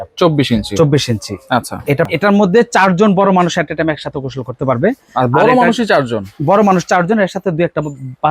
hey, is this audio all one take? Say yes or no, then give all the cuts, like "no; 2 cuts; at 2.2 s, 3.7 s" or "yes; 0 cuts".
no; 1 cut; at 2.1 s